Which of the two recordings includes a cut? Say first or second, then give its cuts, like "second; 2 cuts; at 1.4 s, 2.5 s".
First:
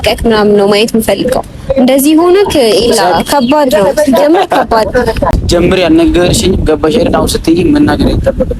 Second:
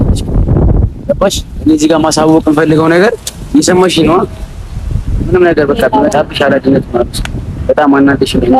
first; 1 cut; at 5.3 s